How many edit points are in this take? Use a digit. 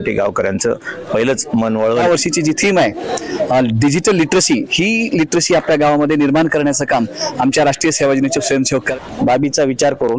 2